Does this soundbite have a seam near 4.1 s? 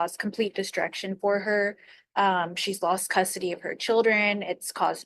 yes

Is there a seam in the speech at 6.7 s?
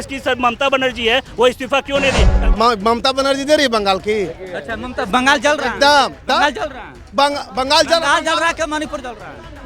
no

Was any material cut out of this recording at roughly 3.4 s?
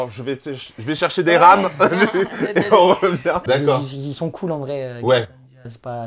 yes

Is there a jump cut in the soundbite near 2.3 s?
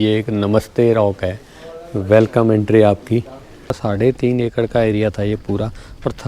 no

